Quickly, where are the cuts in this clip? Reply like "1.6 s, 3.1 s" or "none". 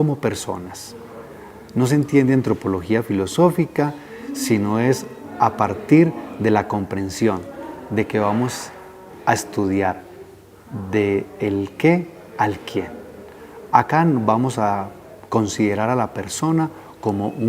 12.6 s

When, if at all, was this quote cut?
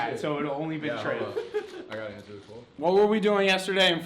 2.7 s

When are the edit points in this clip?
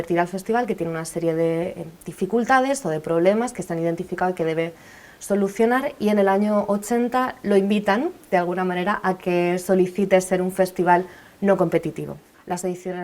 12.1 s

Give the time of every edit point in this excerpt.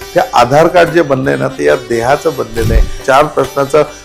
3.0 s

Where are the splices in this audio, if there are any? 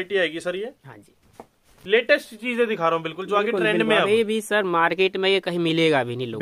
none

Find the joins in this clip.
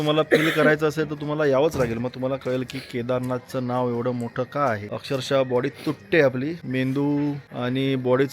4.9 s, 6.6 s, 7.5 s

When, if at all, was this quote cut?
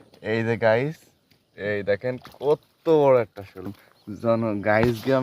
3.7 s

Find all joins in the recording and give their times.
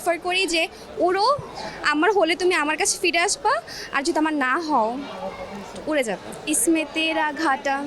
6.3 s

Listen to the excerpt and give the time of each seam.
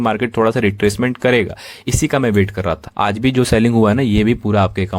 2.8 s

